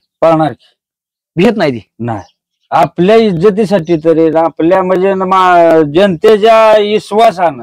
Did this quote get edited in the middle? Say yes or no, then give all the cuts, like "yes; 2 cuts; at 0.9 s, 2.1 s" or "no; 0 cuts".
no; 0 cuts